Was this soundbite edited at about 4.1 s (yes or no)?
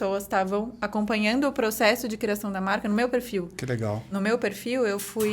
yes